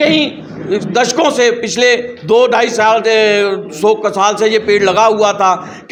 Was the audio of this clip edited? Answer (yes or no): no